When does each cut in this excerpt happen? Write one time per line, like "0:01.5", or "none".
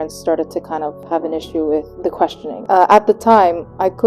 0:01.0
0:02.4